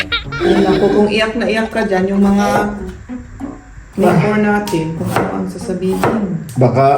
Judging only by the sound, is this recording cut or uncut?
uncut